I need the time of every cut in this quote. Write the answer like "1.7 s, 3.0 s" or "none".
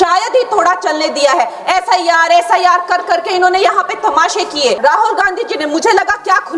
4.8 s